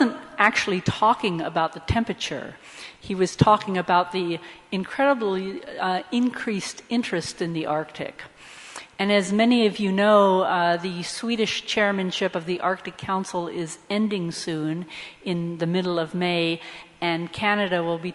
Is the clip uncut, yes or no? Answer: no